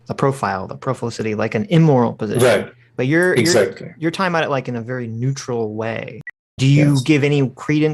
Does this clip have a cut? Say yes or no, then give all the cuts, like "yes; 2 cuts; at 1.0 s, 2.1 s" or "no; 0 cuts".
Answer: yes; 1 cut; at 6.5 s